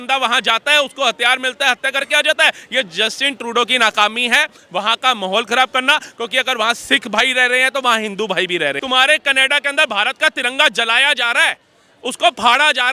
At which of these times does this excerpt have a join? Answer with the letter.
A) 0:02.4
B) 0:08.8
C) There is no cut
B